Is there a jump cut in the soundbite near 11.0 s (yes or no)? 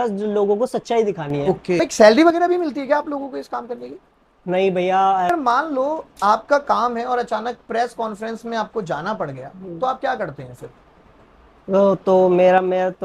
no